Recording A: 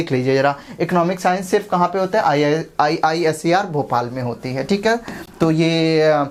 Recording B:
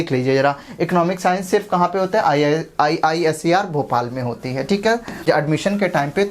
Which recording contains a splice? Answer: B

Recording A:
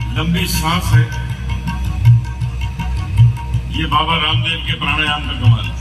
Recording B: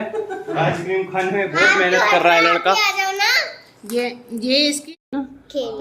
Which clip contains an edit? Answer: B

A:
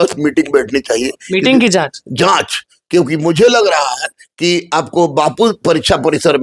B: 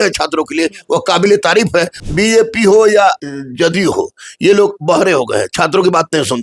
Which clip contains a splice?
B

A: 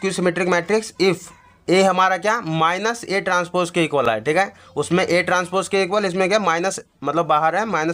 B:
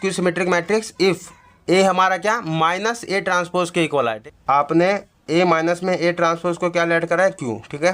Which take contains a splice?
B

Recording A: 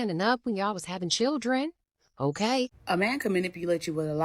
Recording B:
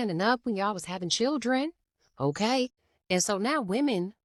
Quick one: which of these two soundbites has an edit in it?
A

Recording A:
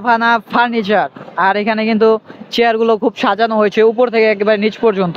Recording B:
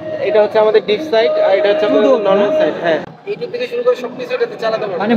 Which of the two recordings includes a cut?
B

